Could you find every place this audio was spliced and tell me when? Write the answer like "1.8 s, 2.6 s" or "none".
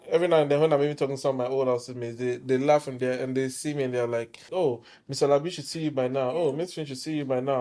4.5 s

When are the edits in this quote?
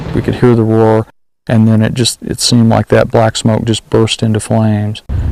none

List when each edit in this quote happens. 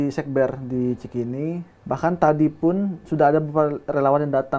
1.7 s

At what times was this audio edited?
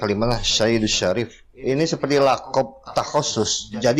1.4 s

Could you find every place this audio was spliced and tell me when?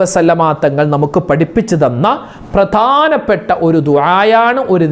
none

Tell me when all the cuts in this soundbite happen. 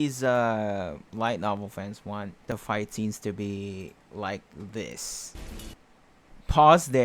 2.4 s, 5.3 s

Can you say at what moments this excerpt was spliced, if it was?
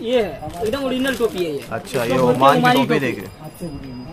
none

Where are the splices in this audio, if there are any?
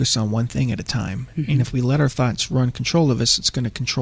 none

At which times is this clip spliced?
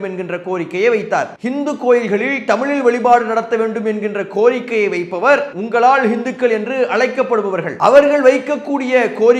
1.3 s, 5.6 s, 7.7 s

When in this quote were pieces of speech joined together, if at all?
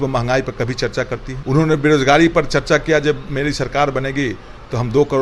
1.3 s

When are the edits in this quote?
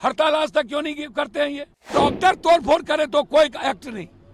1.9 s

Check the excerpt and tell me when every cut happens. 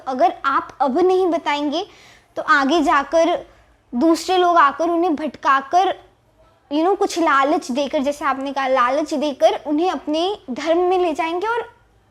none

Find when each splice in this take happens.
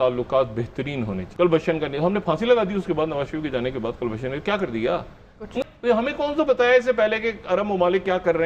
1.2 s, 5.7 s

